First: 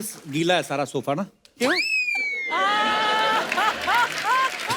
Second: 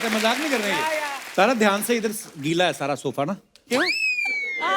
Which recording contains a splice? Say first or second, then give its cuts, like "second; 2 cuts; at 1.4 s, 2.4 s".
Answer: second; 1 cut; at 1.2 s